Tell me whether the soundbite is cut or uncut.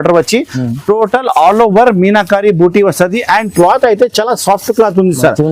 uncut